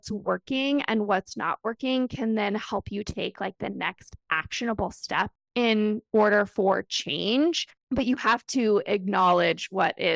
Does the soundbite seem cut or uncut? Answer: uncut